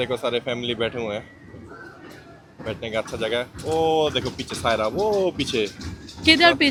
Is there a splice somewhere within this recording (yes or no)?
no